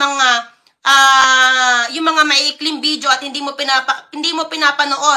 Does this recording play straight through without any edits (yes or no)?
yes